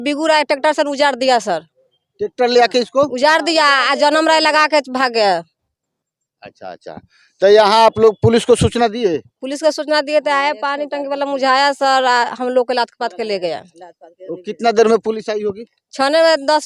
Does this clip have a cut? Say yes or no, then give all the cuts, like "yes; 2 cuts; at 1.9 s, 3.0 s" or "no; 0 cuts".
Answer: no; 0 cuts